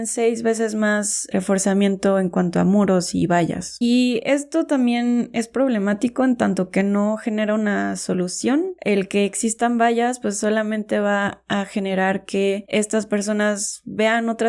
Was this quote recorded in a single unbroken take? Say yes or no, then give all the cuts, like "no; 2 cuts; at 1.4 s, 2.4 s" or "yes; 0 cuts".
no; 2 cuts; at 3.7 s, 8.8 s